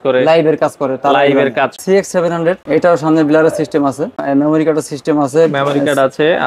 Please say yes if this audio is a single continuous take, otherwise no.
no